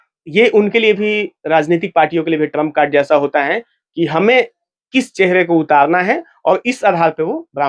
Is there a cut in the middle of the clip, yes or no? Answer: no